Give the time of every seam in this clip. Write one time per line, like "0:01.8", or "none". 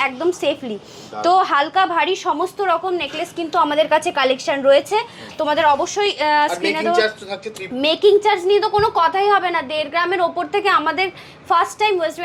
none